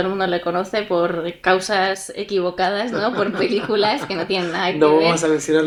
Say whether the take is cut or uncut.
uncut